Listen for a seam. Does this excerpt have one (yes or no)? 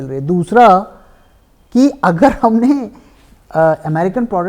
no